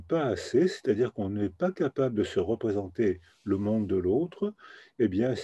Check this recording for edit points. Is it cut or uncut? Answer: uncut